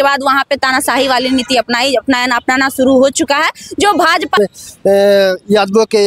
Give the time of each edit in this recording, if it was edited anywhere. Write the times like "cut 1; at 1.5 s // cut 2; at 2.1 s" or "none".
cut 1; at 4.4 s